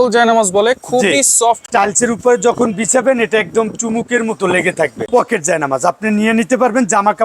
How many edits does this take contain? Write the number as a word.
two